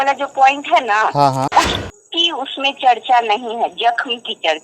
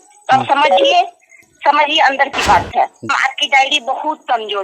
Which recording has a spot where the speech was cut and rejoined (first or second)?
second